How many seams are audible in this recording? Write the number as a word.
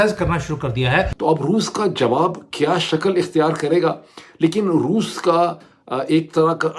one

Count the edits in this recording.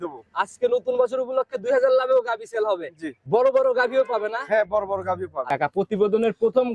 one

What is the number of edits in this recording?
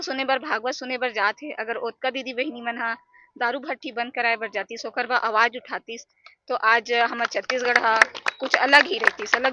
zero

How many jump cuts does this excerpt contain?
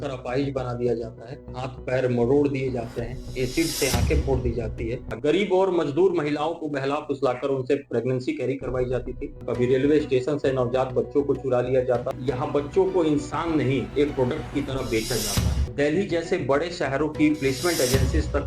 four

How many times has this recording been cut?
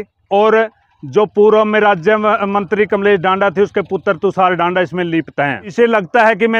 one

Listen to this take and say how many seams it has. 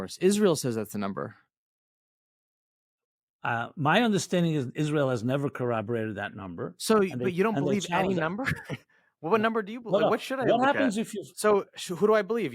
one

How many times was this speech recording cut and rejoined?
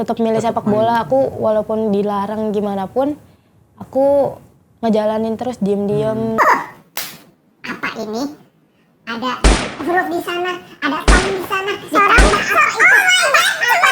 one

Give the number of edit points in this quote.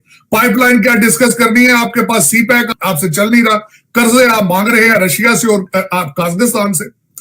one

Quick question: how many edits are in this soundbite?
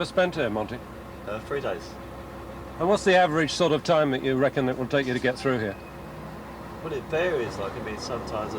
one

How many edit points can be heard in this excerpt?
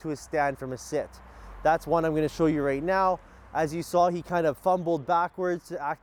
zero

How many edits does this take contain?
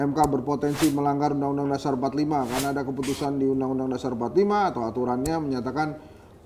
zero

